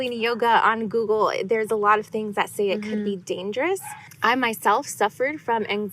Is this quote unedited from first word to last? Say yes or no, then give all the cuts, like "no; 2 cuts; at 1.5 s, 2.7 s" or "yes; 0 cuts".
no; 1 cut; at 4.1 s